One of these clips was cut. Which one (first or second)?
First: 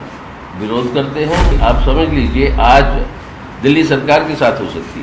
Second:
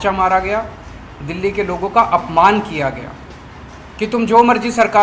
first